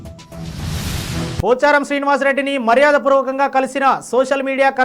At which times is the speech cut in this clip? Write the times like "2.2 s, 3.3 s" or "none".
1.3 s